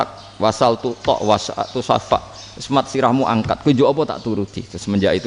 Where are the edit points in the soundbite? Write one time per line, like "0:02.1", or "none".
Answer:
none